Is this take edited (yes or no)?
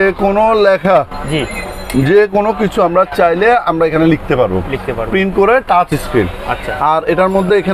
no